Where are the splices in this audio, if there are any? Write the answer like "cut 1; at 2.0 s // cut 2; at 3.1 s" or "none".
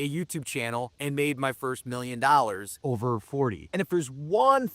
cut 1; at 0.9 s // cut 2; at 3.2 s